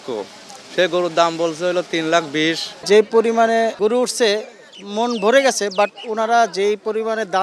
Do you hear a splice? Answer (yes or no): yes